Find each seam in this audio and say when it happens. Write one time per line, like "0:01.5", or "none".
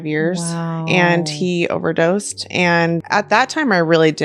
0:03.0

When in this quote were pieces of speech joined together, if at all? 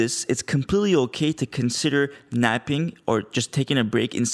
none

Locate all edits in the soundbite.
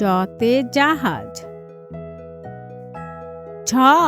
0:01.2
0:03.1

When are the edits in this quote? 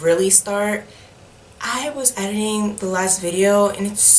none

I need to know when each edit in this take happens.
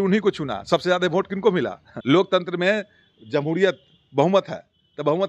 0:01.9

